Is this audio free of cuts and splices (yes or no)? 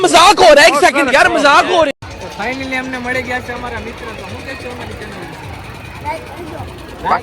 no